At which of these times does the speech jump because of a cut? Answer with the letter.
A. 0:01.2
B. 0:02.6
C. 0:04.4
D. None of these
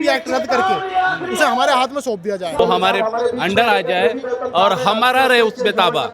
B